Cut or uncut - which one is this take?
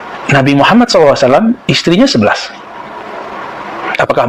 uncut